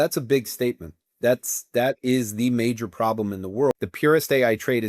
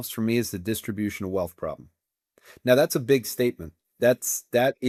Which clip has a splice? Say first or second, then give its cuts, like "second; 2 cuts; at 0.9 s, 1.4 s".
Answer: first; 1 cut; at 3.8 s